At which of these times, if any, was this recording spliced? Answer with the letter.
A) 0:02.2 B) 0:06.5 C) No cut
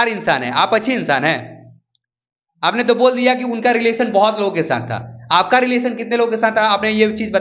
C